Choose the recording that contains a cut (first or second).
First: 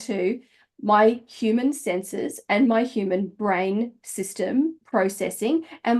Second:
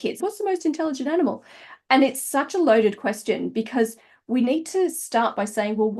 first